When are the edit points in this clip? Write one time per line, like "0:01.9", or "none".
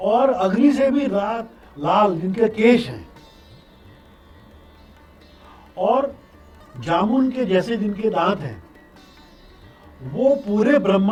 none